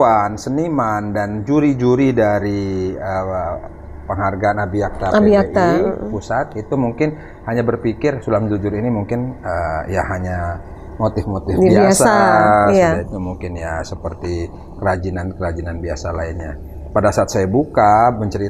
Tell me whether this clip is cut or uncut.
uncut